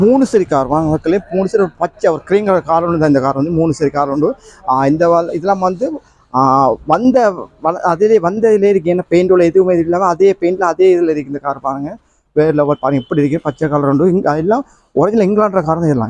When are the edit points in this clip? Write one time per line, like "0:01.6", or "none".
none